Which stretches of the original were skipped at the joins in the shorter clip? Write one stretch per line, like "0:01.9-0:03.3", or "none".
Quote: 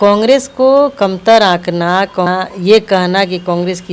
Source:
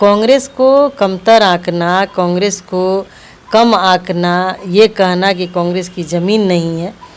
0:02.3-0:04.4